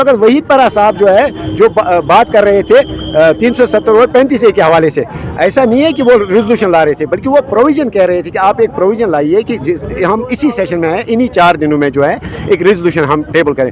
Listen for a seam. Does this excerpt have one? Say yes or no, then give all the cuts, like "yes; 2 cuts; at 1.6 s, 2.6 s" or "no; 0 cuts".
no; 0 cuts